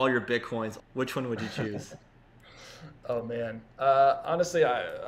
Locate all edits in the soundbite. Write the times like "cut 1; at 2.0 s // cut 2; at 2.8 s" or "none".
none